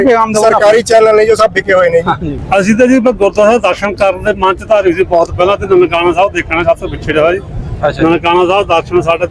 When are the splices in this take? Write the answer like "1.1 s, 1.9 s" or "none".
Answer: 2.3 s